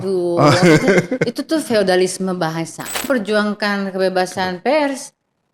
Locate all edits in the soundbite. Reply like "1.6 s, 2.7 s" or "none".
3.1 s